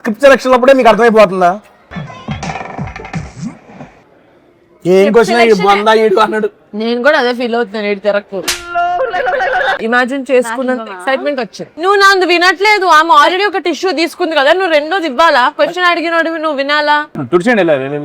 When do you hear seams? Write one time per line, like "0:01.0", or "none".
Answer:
0:09.8
0:11.7
0:17.1